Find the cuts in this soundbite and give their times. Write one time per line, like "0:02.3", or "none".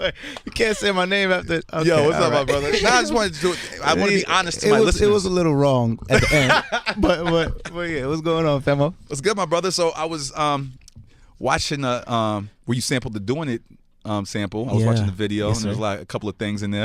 0:01.6